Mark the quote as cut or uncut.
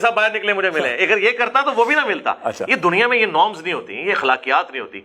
uncut